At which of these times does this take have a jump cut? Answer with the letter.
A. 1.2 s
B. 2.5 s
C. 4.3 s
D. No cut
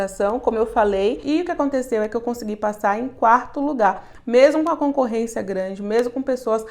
A